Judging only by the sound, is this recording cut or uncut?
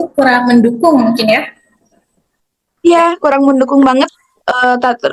cut